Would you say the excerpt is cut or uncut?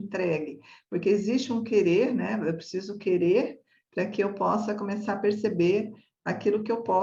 uncut